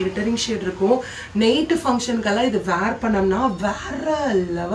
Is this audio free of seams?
yes; 0 cuts

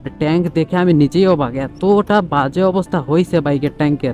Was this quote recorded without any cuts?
yes; 0 cuts

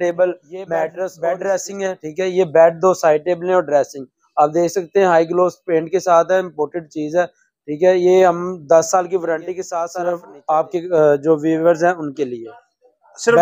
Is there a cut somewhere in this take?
yes; 2 cuts; at 1.1 s, 10.3 s

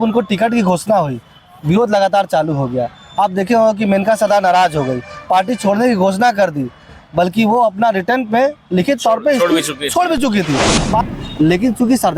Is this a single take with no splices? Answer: no; 1 cut; at 11.0 s

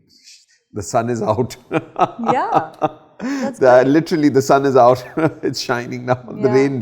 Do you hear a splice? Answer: no; 0 cuts

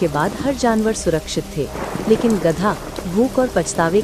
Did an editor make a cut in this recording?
no; 0 cuts

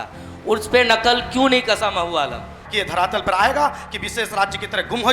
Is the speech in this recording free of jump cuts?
no; 1 cut; at 2.6 s

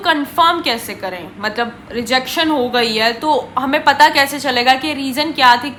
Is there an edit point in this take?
no; 0 cuts

